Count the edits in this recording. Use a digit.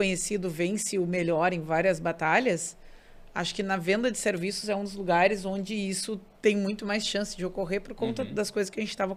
0